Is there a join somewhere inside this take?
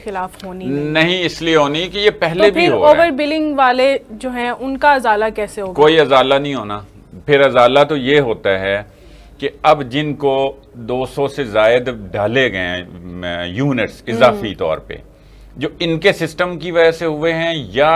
no; 0 cuts

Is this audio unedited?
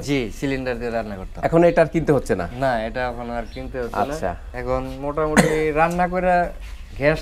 no; 1 cut; at 4.5 s

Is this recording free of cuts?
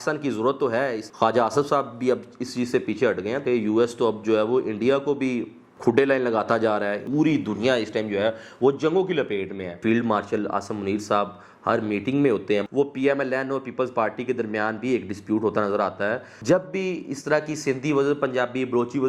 no; 6 cuts; at 1.0 s, 3.4 s, 7.0 s, 9.8 s, 12.7 s, 16.3 s

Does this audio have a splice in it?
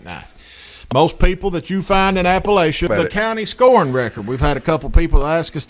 yes; 1 cut; at 2.9 s

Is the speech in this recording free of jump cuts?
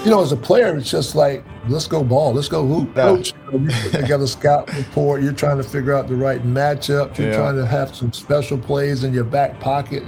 no; 2 cuts; at 1.5 s, 2.9 s

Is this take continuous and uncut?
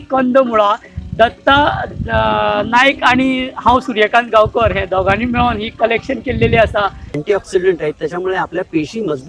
no; 1 cut; at 7.2 s

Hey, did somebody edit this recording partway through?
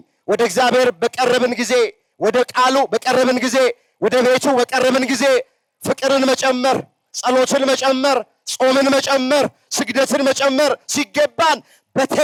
no; 0 cuts

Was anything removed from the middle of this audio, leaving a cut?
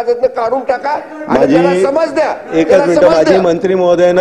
no; 0 cuts

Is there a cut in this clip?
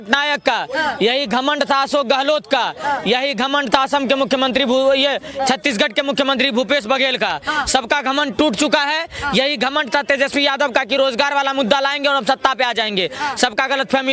no; 0 cuts

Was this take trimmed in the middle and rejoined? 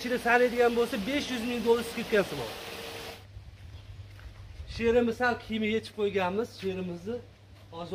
yes; 1 cut; at 3.2 s

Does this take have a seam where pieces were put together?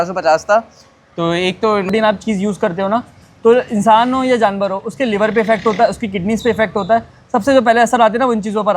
yes; 1 cut; at 1.9 s

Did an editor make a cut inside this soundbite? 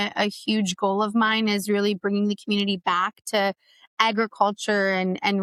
no; 0 cuts

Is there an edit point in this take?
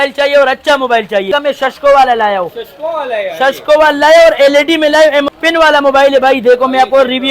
yes; 2 cuts; at 1.3 s, 5.3 s

